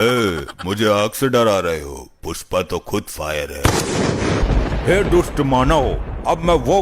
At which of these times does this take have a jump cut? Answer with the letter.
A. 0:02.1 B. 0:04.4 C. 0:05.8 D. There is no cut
B